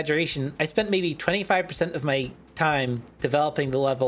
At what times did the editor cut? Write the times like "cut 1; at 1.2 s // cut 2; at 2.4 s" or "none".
none